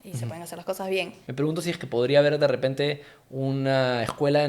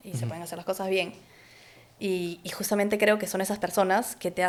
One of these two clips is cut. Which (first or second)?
first